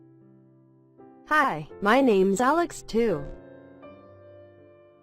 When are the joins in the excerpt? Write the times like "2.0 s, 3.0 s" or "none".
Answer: 1.3 s, 3.2 s